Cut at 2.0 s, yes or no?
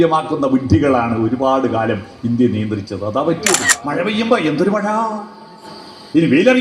no